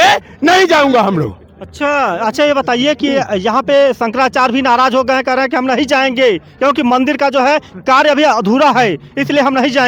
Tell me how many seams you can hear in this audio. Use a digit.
0